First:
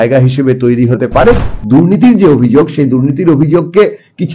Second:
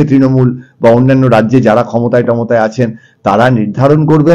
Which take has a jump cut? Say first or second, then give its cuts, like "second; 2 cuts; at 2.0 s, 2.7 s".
first; 1 cut; at 1.4 s